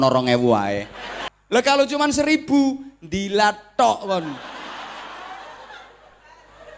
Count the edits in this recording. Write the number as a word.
one